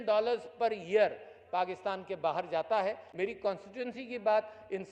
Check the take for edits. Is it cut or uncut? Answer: cut